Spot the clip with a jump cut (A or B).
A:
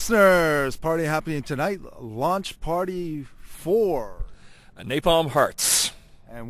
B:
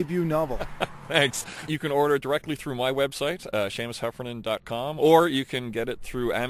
B